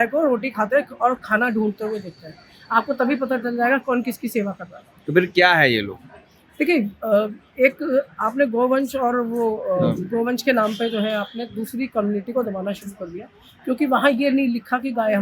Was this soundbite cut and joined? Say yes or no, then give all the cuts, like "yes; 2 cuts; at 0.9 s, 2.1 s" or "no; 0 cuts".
no; 0 cuts